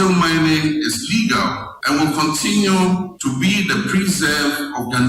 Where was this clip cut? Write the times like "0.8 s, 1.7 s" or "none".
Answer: 1.7 s, 3.1 s

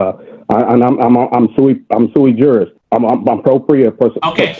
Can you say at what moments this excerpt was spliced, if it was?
2.8 s

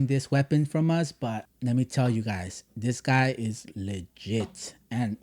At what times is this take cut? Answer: 1.5 s

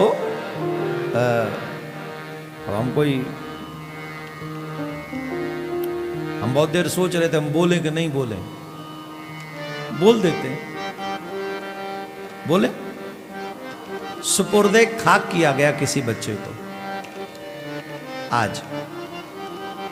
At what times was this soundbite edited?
none

